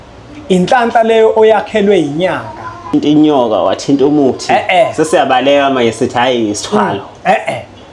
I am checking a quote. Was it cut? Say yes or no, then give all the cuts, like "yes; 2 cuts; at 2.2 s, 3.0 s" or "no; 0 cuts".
yes; 1 cut; at 2.9 s